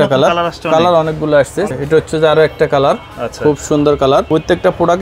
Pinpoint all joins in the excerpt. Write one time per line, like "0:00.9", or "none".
0:01.7
0:04.3